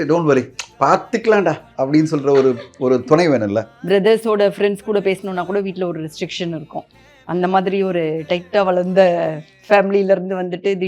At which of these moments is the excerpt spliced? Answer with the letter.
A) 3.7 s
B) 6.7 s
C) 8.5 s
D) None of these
A